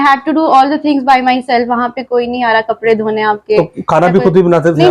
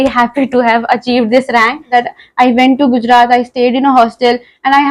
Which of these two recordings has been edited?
second; 1 cut; at 1.9 s

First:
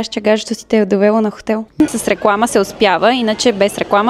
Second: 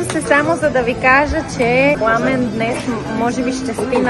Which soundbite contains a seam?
first; 1 cut; at 1.8 s

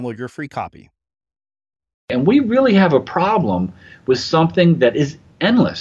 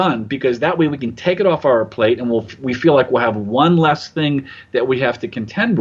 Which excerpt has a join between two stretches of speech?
first; 1 cut; at 2.1 s

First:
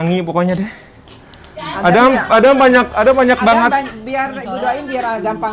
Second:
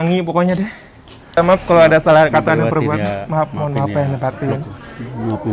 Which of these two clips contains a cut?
second; 1 cut; at 1.3 s

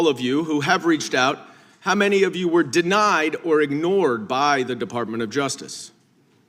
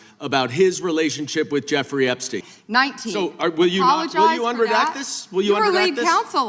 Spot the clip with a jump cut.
second; 1 cut; at 2.5 s

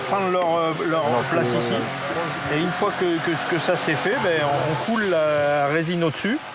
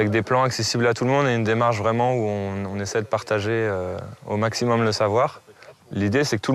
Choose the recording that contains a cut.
first; 1 cut; at 4.3 s

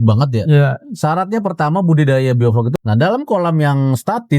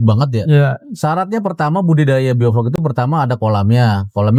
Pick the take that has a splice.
first; 1 cut; at 2.7 s

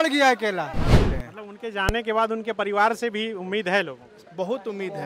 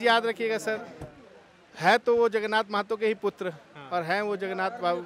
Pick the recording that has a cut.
first; 1 cut; at 1.1 s

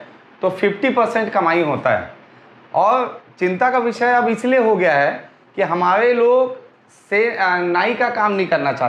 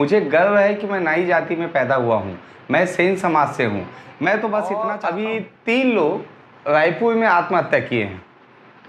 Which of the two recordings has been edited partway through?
second; 1 cut; at 4.9 s

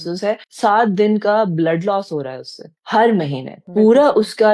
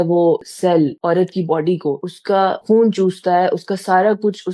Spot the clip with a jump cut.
second; 2 cuts; at 0.7 s, 2.4 s

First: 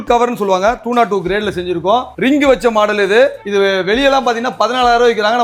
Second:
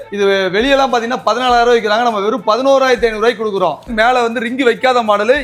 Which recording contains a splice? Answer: second; 1 cut; at 3.9 s

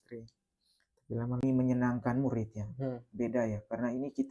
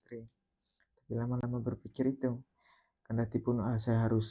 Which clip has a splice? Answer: first; 1 cut; at 1.4 s

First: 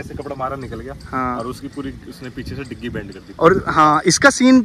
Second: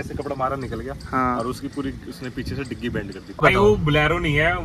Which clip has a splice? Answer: second; 1 cut; at 3.4 s

